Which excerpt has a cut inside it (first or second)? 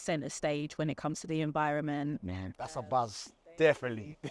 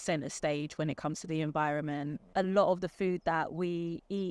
second